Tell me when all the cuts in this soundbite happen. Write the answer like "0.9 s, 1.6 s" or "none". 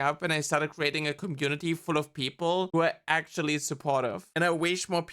2.7 s, 4.2 s